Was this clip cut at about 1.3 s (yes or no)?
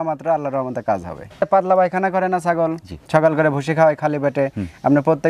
yes